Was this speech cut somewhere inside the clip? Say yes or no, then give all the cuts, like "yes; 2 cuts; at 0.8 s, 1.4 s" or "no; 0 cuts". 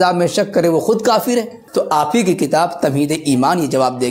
yes; 1 cut; at 1.6 s